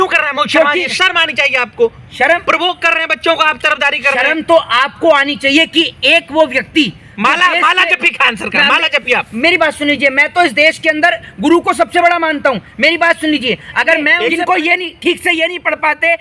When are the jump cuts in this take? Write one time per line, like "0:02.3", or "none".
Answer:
0:14.1